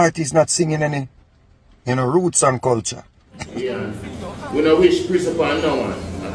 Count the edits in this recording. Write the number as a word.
one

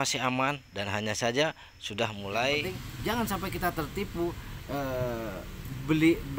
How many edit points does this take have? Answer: one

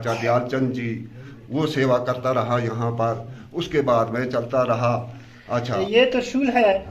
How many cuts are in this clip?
one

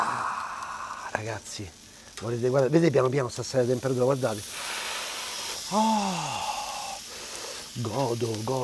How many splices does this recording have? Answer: zero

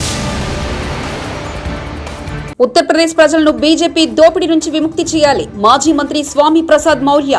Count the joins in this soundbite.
one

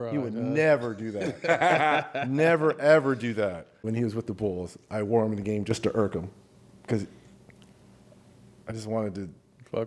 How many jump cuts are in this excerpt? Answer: one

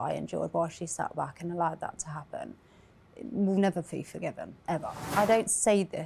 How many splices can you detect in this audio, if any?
one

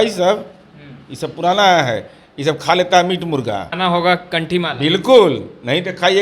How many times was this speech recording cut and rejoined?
one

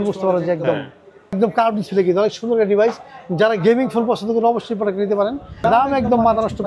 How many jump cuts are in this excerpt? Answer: two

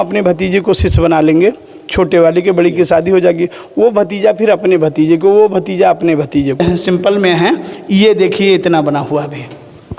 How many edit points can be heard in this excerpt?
one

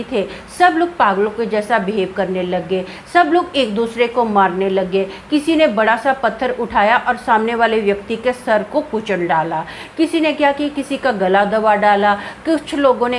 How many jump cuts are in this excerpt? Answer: zero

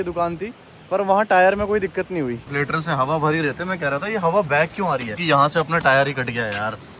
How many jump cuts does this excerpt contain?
two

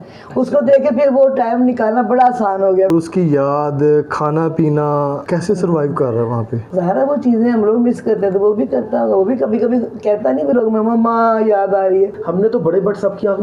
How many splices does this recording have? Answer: four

